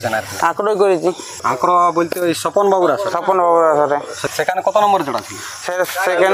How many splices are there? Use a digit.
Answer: 2